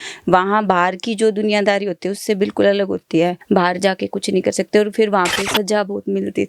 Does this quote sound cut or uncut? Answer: cut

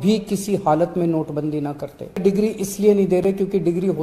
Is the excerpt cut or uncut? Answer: cut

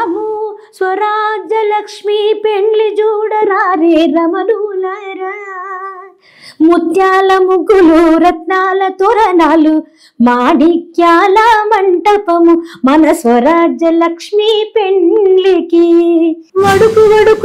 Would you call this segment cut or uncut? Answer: cut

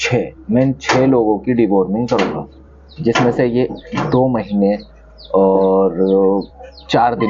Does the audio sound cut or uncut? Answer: uncut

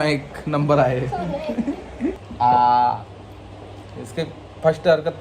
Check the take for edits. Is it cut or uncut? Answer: cut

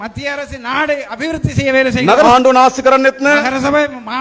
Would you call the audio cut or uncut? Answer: cut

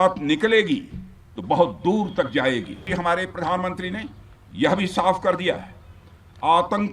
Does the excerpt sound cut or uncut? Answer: cut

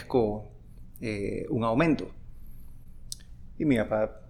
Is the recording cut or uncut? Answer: uncut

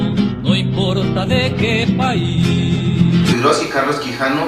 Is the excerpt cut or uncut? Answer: uncut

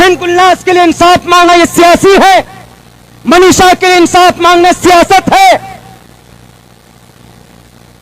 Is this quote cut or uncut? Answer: cut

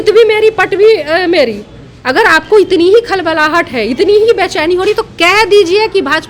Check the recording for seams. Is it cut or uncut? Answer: uncut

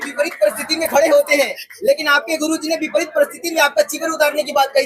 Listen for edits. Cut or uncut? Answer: uncut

